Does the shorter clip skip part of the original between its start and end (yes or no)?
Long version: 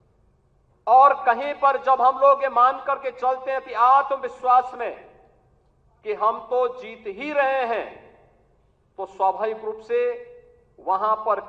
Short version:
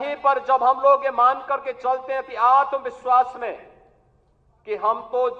no